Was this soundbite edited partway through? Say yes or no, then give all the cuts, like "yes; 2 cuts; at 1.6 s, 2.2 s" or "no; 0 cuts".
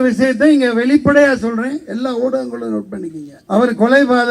yes; 1 cut; at 3.3 s